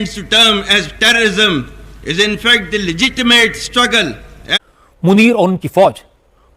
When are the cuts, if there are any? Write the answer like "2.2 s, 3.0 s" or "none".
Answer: 4.6 s